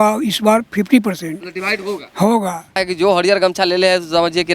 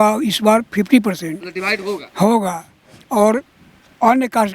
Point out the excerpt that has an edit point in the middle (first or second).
first